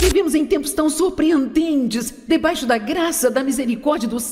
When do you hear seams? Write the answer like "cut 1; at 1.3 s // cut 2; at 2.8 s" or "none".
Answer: none